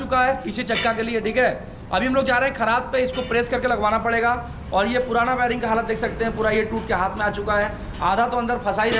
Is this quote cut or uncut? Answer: uncut